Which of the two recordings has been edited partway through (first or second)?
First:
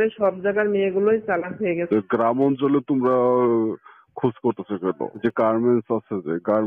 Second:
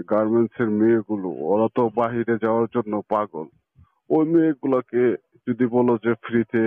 first